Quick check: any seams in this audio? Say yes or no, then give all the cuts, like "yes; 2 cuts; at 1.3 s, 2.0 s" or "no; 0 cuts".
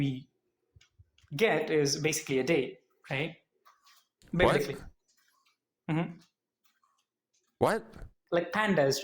yes; 1 cut; at 8.1 s